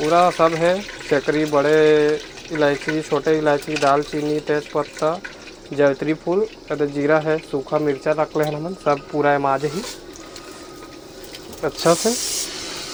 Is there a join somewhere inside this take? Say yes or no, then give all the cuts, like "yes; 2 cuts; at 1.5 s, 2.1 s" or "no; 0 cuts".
no; 0 cuts